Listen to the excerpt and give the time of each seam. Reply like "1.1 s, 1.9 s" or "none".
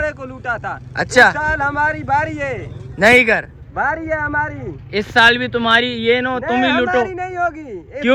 none